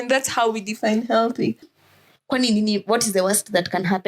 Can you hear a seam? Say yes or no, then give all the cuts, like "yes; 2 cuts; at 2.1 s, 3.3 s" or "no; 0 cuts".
yes; 1 cut; at 1.8 s